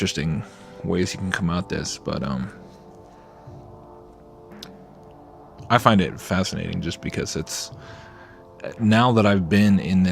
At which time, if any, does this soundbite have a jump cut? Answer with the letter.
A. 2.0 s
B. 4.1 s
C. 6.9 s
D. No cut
C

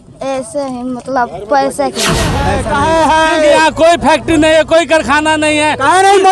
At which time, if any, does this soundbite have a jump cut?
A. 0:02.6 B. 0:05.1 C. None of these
A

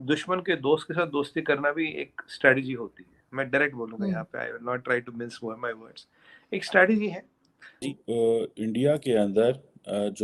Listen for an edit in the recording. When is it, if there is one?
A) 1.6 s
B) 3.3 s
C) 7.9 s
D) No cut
C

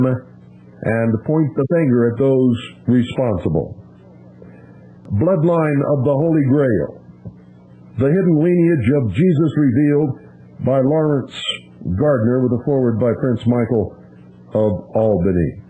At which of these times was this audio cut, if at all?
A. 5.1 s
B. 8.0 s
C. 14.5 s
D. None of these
A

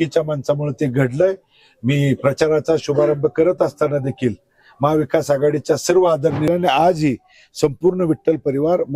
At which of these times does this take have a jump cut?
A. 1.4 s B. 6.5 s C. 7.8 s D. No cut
B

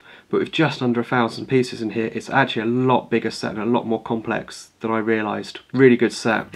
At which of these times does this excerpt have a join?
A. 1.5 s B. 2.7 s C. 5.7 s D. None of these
D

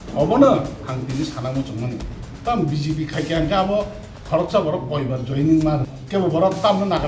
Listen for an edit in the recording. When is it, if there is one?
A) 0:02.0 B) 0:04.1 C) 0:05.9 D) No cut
C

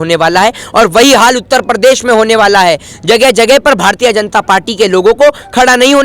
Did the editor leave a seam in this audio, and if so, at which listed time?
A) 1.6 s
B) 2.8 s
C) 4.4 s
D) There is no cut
D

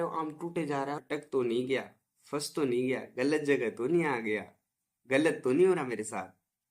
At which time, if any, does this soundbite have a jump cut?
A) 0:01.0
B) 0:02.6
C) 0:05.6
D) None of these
A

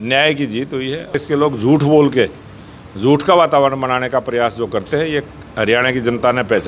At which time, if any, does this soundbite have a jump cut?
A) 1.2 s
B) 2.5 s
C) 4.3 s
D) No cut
A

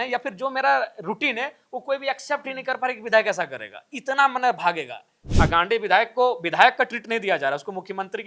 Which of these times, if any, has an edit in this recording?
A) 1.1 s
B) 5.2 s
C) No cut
B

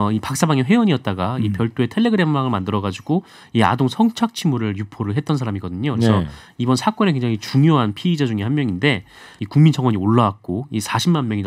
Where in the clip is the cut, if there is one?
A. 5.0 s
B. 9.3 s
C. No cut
B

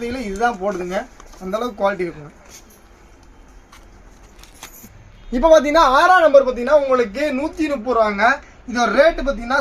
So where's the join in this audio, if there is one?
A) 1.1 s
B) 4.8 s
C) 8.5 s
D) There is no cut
B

